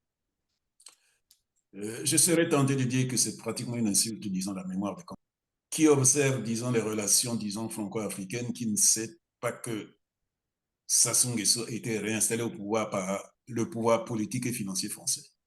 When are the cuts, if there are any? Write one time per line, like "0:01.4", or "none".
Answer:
0:05.0